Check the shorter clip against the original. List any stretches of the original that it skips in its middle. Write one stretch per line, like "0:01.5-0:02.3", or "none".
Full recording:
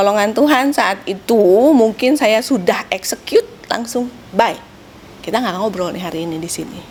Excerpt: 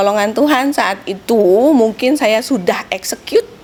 none